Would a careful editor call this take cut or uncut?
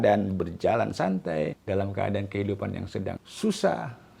cut